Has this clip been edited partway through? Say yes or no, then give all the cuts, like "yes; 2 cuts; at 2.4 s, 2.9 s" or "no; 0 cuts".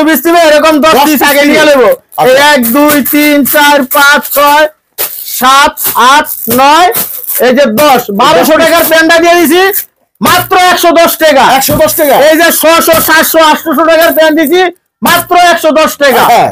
no; 0 cuts